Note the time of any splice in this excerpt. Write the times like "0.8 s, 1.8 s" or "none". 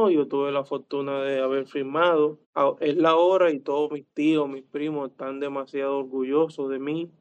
2.4 s

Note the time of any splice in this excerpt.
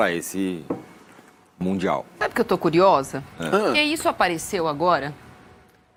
none

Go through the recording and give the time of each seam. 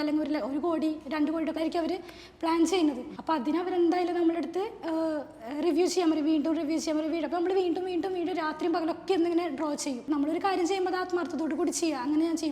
1.6 s, 3.1 s, 10.0 s

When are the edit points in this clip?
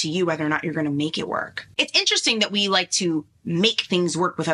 1.6 s

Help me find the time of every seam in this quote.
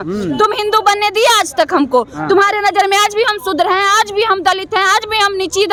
none

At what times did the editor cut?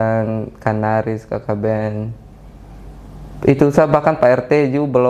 none

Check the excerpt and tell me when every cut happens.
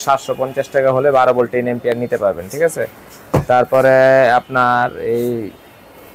none

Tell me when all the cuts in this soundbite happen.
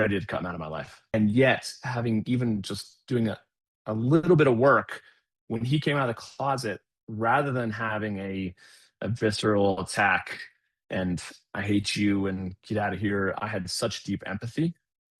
1.1 s

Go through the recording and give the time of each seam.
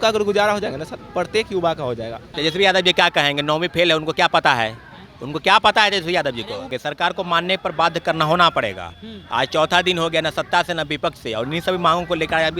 2.3 s, 6.7 s

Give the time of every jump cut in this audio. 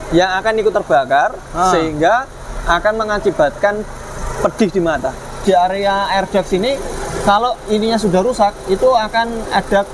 5.4 s

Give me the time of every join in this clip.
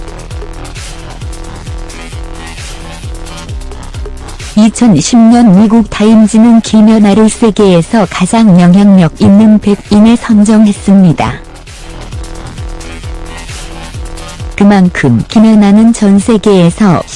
13.3 s

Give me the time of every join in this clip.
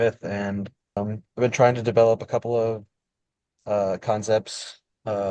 1.0 s

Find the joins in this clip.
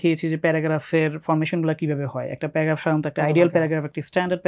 none

